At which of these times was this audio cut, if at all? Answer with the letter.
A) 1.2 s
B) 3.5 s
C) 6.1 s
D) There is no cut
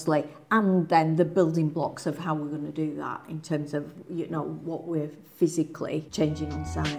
C